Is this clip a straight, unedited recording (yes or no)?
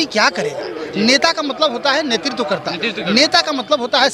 yes